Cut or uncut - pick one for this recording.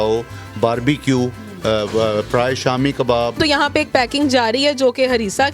cut